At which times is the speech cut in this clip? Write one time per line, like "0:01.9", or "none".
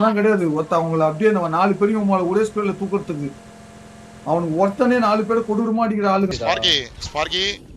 0:06.3

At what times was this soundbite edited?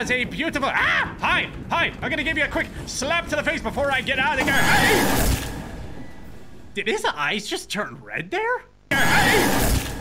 0:08.9

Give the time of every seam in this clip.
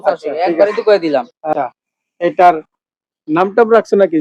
0:01.5

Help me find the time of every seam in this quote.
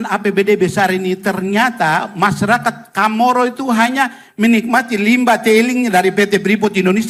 none

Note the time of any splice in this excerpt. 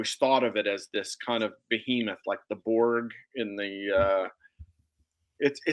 none

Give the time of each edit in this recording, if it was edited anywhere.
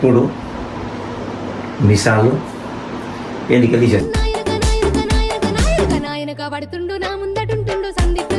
none

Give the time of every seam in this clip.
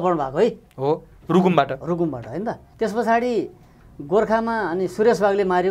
0:02.6

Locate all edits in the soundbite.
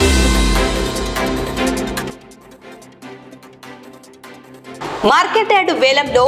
none

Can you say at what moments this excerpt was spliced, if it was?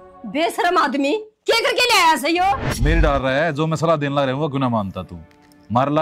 0:02.7

